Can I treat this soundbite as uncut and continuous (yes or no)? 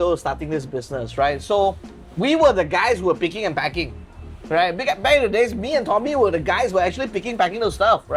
yes